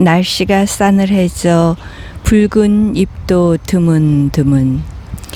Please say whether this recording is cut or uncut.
uncut